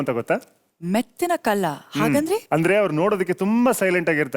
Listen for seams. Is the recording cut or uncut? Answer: uncut